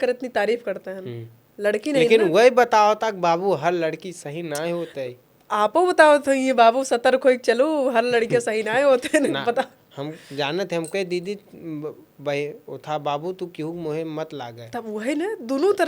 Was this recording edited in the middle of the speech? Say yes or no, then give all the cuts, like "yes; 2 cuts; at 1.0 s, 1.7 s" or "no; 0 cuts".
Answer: no; 0 cuts